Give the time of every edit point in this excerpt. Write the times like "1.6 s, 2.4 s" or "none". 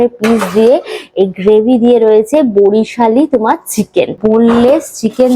4.2 s